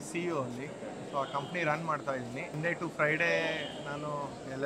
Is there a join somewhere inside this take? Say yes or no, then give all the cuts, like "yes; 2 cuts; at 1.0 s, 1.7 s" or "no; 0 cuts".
yes; 1 cut; at 2.6 s